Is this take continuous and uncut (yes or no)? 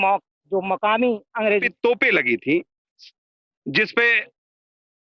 no